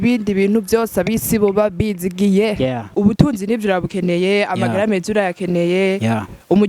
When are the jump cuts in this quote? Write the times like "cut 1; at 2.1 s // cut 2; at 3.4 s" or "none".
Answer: cut 1; at 2.9 s